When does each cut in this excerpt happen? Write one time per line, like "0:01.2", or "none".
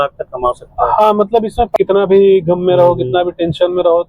0:01.7